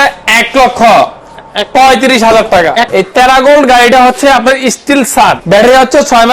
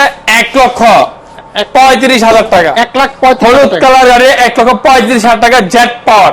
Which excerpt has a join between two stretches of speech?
first; 2 cuts; at 2.9 s, 5.4 s

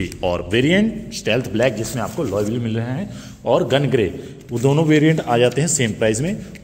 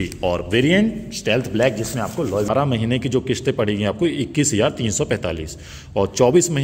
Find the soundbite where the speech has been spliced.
second; 1 cut; at 2.5 s

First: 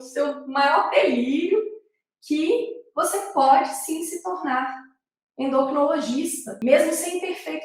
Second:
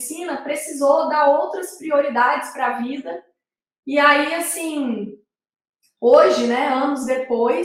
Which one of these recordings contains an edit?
first; 1 cut; at 6.6 s

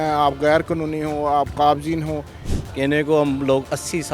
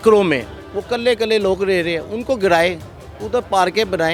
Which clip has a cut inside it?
first; 1 cut; at 2.4 s

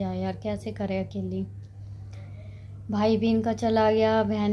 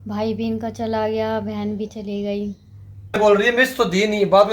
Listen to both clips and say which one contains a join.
second; 1 cut; at 3.1 s

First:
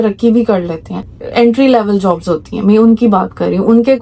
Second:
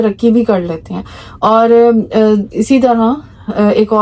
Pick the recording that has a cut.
first; 1 cut; at 1.2 s

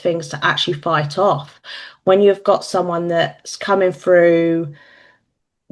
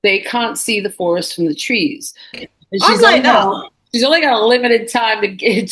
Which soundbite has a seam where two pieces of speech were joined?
second; 1 cut; at 2.4 s

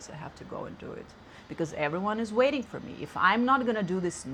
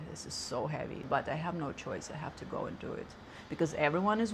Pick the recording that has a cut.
second; 1 cut; at 1.1 s

